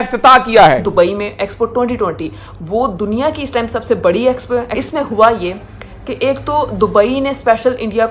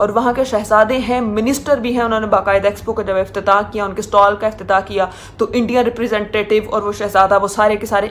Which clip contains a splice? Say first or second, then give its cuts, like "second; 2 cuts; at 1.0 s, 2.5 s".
first; 2 cuts; at 0.9 s, 4.7 s